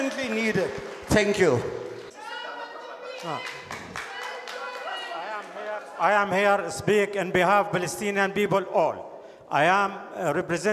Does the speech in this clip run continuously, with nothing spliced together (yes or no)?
no